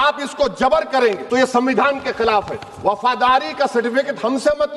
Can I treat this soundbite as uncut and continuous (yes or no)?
no